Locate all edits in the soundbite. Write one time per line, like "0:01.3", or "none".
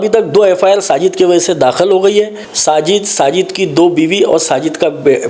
0:02.4